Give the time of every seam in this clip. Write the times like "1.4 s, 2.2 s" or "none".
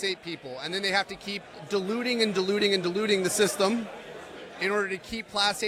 none